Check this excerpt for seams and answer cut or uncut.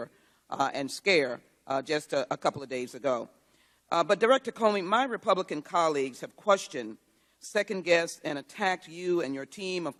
uncut